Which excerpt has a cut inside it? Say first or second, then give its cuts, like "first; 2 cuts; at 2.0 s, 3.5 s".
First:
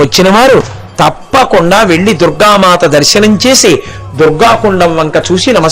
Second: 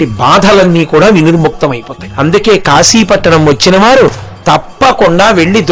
second; 1 cut; at 2.0 s